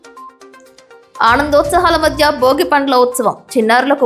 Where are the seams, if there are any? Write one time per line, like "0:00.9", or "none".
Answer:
none